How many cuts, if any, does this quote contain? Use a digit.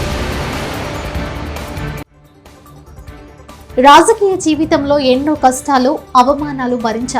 1